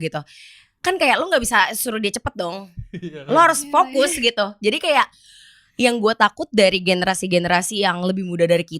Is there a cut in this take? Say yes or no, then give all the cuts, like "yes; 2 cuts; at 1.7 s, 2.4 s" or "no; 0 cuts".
no; 0 cuts